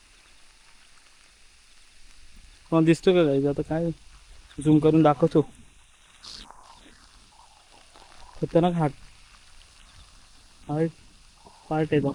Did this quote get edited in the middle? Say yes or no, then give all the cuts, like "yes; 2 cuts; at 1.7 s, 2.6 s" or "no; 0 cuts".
no; 0 cuts